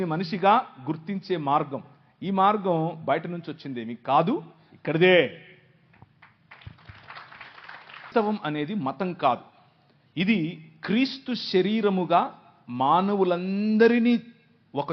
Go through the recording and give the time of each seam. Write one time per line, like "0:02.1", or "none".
0:08.1